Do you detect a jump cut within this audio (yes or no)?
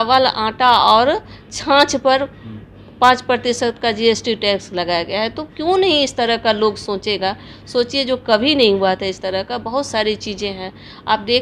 no